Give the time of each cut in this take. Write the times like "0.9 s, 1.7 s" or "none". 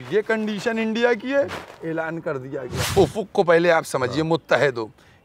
2.8 s